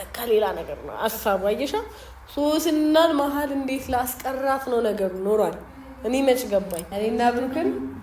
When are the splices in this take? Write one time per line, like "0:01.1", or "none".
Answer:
0:06.8